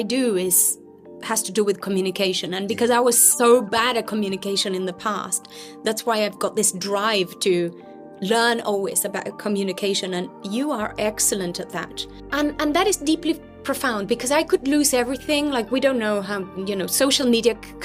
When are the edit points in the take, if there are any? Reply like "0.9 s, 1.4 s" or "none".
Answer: 12.1 s